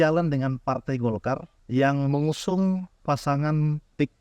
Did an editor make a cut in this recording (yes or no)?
yes